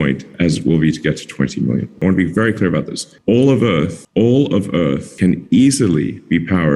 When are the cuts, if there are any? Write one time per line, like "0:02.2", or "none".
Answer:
none